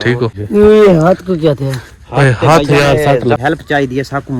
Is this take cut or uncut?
cut